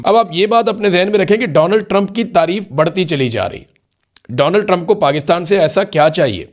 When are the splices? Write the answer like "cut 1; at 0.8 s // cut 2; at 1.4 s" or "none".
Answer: none